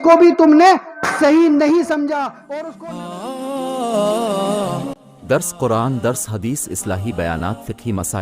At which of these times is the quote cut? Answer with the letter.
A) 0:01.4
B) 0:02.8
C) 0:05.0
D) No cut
B